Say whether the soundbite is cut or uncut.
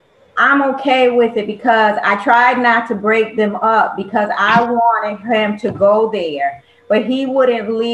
uncut